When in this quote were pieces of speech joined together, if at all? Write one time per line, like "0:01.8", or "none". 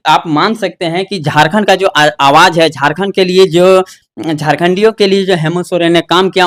none

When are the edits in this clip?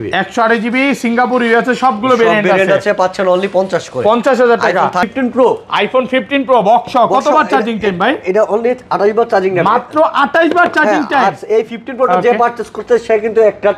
0:05.1

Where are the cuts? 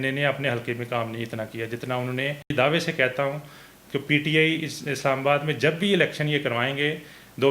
0:02.5

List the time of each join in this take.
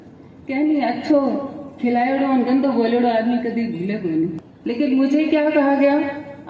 0:04.5

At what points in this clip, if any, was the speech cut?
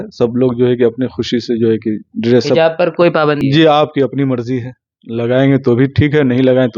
0:03.4

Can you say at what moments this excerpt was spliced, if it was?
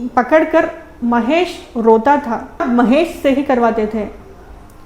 0:02.6

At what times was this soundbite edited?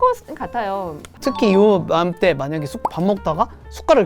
0:01.2

